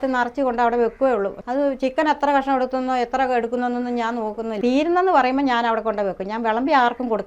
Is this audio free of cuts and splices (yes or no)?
no